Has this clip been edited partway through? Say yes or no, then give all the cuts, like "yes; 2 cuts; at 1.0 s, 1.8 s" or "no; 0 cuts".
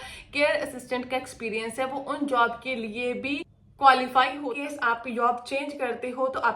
yes; 2 cuts; at 3.6 s, 4.4 s